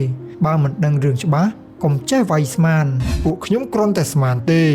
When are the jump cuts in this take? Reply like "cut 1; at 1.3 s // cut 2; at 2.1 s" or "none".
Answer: cut 1; at 3.1 s